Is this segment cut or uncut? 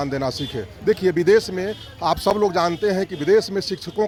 uncut